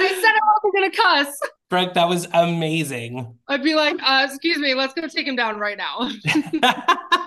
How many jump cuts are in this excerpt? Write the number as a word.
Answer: one